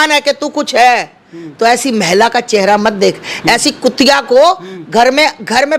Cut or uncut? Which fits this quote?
uncut